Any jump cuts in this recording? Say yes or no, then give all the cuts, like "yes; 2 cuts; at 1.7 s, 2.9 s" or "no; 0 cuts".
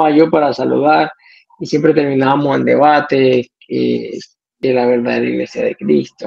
yes; 1 cut; at 4.4 s